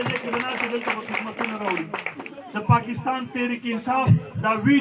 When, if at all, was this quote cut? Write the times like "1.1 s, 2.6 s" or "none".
2.2 s